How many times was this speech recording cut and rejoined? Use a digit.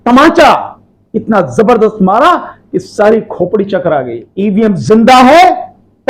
1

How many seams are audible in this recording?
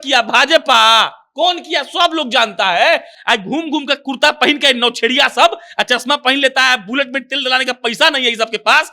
1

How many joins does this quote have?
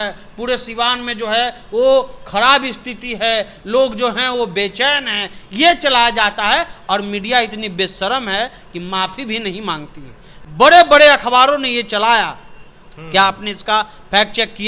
0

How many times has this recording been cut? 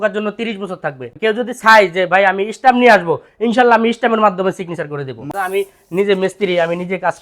2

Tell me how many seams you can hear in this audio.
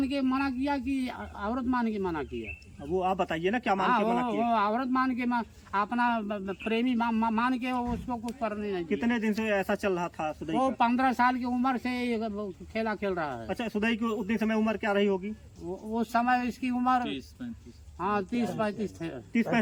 0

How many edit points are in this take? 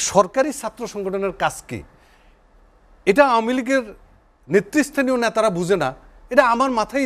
0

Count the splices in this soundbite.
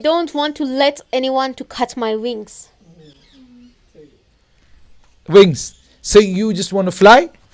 0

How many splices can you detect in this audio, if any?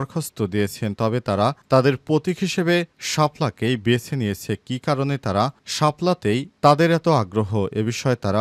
0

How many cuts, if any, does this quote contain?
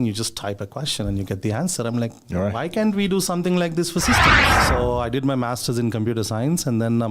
1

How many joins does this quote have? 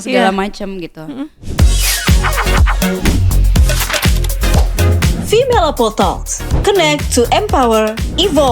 1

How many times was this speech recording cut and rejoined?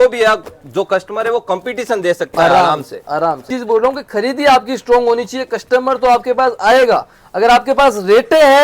1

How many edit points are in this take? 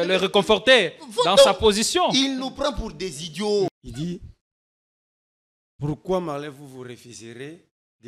1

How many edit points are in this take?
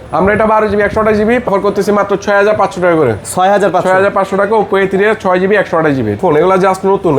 2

